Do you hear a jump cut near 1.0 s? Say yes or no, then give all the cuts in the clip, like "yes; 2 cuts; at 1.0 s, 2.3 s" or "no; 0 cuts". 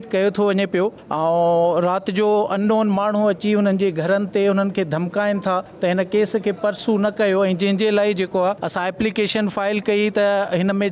yes; 3 cuts; at 1.0 s, 5.7 s, 8.6 s